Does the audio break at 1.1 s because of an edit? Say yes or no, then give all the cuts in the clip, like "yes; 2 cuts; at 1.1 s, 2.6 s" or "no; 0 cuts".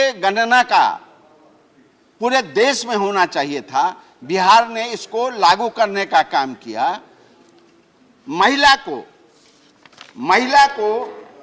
no; 0 cuts